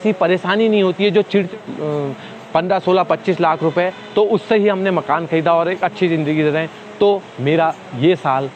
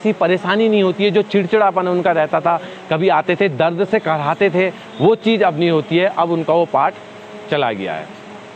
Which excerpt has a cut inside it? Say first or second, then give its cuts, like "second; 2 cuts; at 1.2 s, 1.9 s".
first; 1 cut; at 1.5 s